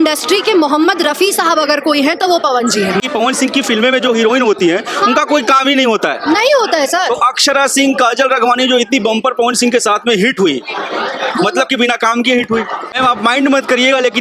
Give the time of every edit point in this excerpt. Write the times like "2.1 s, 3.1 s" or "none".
3.0 s, 12.9 s